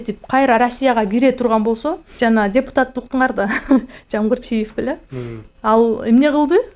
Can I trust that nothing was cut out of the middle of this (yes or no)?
no